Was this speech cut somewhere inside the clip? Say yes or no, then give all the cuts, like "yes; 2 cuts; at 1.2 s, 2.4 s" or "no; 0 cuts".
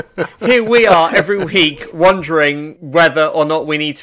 yes; 1 cut; at 2.7 s